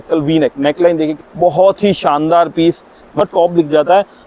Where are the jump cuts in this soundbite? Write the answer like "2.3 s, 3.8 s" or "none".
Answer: 1.2 s, 3.2 s